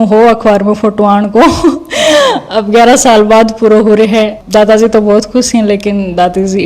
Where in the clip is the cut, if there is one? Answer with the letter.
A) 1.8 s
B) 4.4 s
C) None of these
B